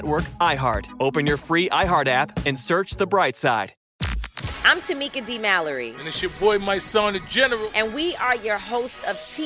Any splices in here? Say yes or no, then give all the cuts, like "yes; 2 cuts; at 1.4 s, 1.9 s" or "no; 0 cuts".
yes; 1 cut; at 3.8 s